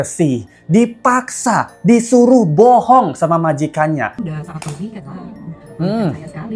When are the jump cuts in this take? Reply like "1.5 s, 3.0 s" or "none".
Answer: 4.3 s